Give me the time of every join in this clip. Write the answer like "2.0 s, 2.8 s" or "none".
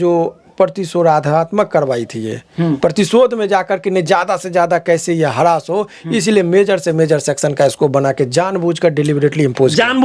none